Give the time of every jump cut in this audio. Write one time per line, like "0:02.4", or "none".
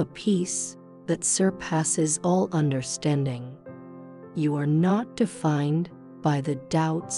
none